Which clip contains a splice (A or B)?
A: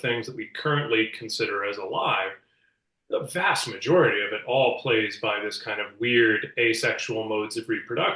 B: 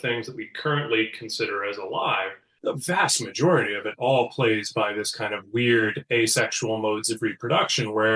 B